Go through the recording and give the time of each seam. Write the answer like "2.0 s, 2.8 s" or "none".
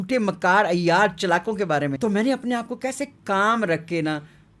1.9 s